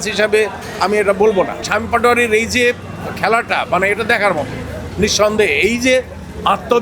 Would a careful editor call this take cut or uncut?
cut